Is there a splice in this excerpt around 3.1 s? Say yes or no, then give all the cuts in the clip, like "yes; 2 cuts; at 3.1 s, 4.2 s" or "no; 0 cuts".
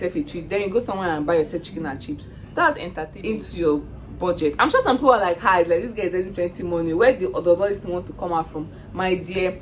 yes; 1 cut; at 3.1 s